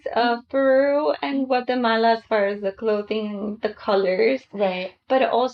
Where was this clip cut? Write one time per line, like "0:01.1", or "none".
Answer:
none